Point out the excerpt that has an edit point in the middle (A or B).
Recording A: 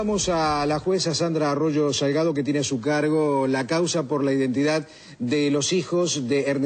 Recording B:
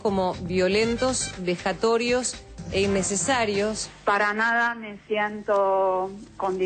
B